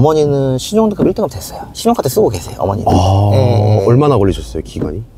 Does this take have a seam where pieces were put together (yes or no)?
no